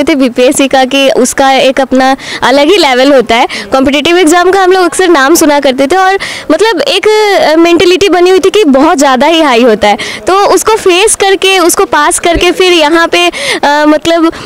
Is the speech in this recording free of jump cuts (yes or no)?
yes